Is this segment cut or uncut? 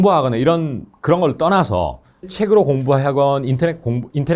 cut